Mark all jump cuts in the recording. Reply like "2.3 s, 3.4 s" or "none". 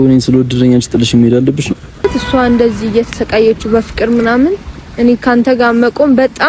2.0 s